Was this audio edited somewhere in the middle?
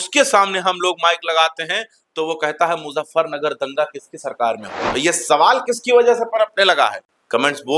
yes; 1 cut; at 4.8 s

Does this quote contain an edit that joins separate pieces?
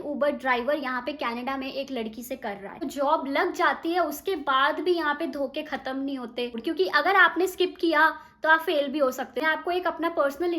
yes; 3 cuts; at 2.8 s, 6.6 s, 9.3 s

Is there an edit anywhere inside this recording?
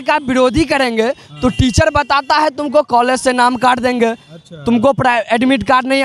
no; 0 cuts

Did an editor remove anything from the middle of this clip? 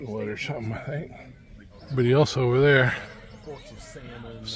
yes; 1 cut; at 1.7 s

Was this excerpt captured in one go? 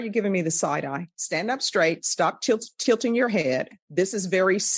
no; 2 cuts; at 1.1 s, 3.8 s

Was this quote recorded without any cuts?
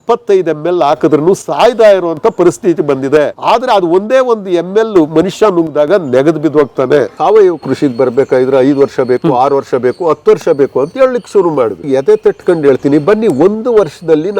no; 3 cuts; at 3.4 s, 7.2 s, 11.9 s

